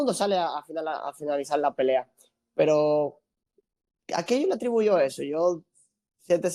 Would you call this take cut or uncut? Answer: uncut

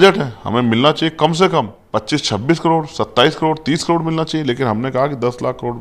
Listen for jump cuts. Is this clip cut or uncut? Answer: cut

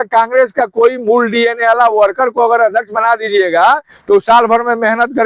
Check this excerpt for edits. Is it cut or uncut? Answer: uncut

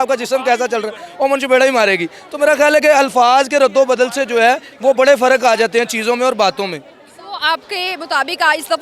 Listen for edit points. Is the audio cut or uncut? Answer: uncut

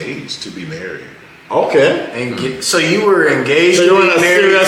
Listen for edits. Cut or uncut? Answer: uncut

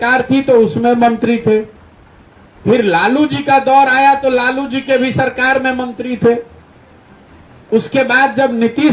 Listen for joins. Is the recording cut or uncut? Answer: uncut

